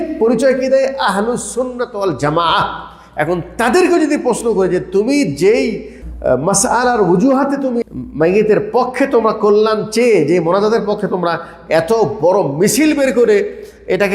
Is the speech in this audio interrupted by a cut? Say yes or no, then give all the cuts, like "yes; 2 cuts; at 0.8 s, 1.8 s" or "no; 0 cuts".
yes; 2 cuts; at 6.0 s, 7.8 s